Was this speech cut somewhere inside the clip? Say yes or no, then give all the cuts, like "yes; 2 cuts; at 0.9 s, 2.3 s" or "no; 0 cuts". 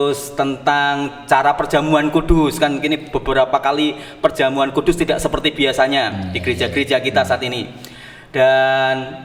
no; 0 cuts